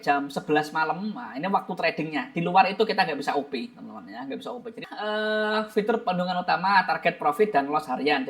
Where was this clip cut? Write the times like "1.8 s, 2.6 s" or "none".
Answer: 4.9 s